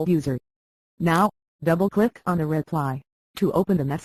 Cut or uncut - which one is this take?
uncut